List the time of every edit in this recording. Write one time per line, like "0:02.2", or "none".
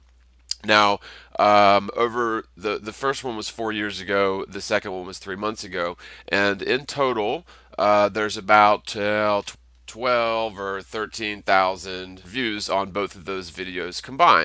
0:01.1